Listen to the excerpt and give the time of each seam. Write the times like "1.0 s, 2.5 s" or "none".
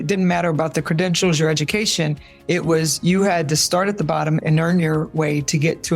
4.4 s